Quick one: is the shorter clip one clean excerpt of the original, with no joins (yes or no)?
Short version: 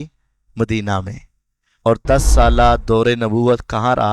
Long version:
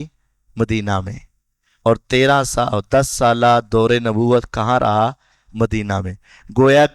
no